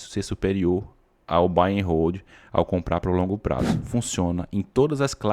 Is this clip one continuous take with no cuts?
no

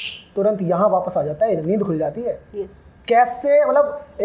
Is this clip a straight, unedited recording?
yes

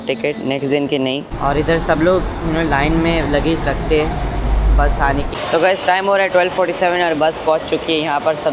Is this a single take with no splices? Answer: no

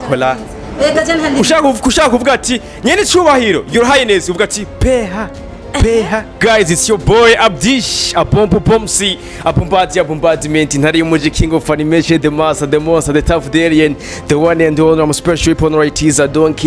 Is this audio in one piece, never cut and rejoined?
no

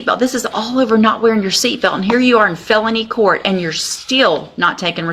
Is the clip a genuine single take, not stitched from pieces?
yes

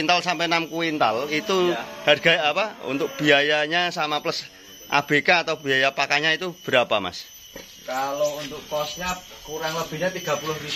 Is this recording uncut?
yes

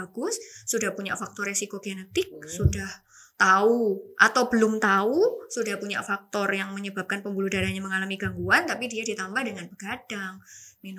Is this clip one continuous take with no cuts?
yes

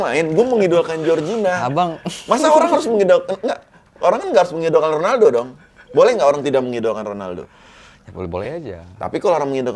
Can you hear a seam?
no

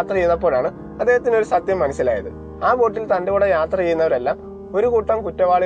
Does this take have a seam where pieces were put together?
no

